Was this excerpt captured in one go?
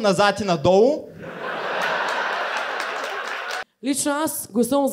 no; 1 cut; at 3.6 s

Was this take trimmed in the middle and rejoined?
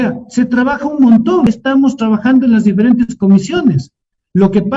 yes; 1 cut; at 1.5 s

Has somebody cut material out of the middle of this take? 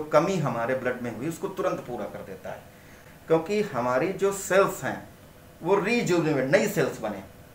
yes; 1 cut; at 3.0 s

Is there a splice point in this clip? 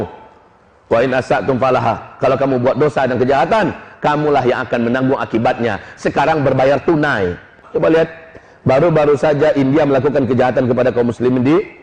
yes; 1 cut; at 7.6 s

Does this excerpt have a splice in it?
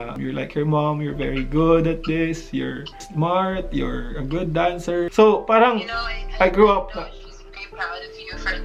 no; 0 cuts

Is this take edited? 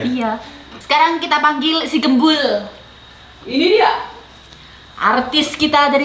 yes; 1 cut; at 3.3 s

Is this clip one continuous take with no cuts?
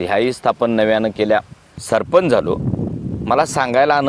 no; 1 cut; at 1.7 s

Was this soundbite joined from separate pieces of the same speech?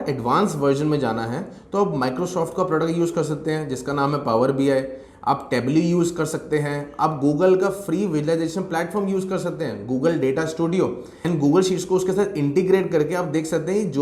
no; 0 cuts

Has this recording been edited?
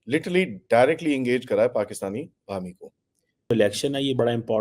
yes; 1 cut; at 3.5 s

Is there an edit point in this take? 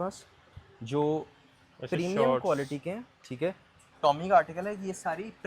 yes; 1 cut; at 3.7 s

